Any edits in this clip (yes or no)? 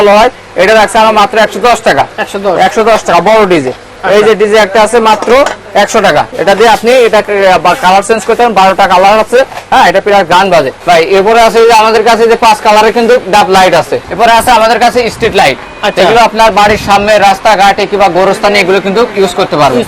yes